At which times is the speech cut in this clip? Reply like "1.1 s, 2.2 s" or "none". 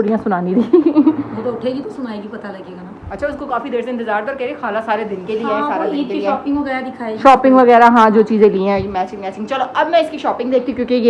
none

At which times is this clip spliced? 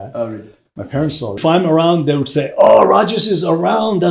1.3 s

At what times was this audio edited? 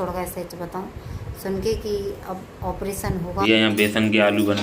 3.5 s

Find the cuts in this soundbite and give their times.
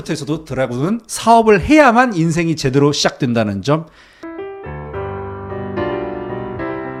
none

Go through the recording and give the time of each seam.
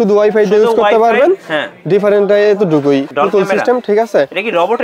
3.1 s

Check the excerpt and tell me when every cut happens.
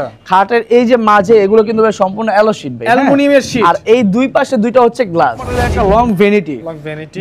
5.6 s

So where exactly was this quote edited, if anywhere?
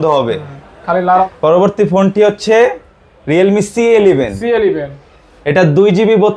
1.3 s

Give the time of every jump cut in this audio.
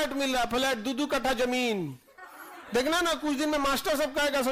none

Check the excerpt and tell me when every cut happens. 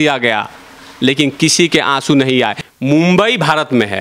2.6 s

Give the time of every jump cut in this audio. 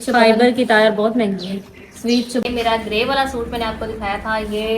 2.4 s

